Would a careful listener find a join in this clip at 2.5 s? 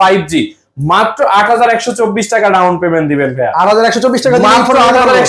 no; 0 cuts

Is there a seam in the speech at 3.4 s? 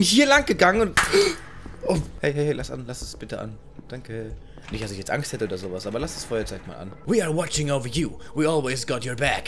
no; 2 cuts; at 2.1 s, 7.0 s

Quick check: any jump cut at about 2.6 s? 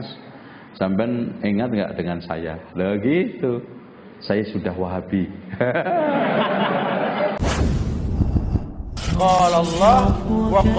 no; 1 cut; at 7.4 s

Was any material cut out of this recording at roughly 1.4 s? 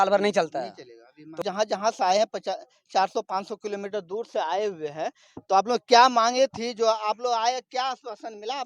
yes; 1 cut; at 1.4 s

